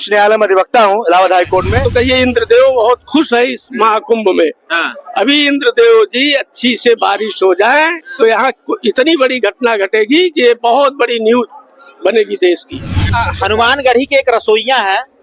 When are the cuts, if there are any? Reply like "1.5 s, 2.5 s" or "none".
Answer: 1.9 s, 13.2 s